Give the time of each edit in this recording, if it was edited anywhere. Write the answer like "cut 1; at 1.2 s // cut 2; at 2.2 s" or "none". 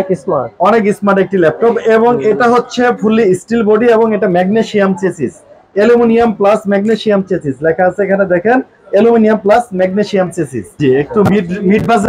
cut 1; at 10.7 s